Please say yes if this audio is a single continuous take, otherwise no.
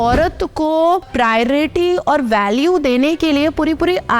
no